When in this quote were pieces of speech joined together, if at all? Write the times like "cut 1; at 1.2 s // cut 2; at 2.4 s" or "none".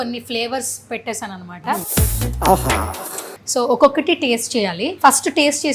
cut 1; at 1.9 s // cut 2; at 3.3 s // cut 3; at 4.9 s